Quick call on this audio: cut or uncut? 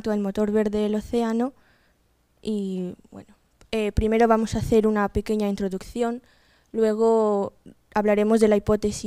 cut